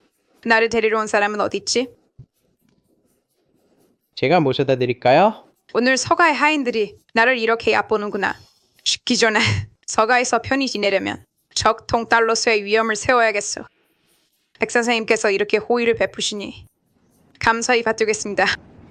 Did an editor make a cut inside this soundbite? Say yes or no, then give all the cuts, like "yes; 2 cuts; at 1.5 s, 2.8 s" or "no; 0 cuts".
no; 0 cuts